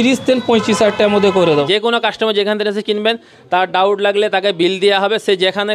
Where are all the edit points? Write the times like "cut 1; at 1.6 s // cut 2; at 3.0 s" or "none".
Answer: cut 1; at 1.7 s